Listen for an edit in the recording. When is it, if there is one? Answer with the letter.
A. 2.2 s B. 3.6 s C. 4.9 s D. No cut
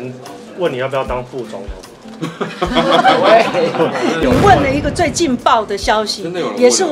D